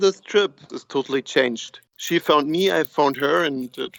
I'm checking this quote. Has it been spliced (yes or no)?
no